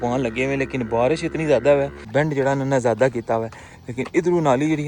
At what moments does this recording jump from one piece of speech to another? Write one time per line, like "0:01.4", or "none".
0:02.1